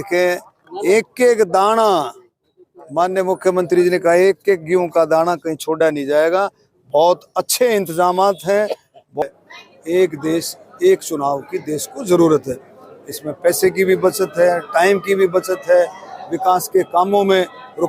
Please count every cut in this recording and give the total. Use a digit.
1